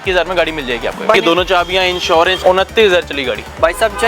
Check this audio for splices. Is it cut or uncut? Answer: cut